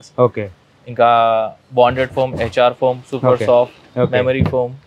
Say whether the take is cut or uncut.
uncut